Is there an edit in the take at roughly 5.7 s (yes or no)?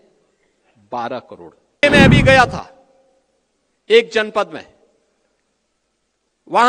no